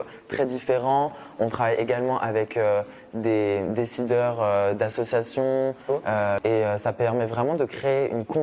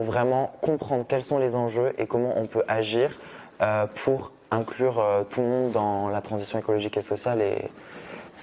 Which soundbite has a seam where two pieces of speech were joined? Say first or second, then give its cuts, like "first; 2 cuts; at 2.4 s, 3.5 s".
first; 1 cut; at 6.4 s